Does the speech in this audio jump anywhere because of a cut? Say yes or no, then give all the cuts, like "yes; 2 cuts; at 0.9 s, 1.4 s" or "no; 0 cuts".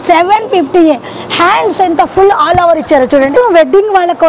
yes; 1 cut; at 3.3 s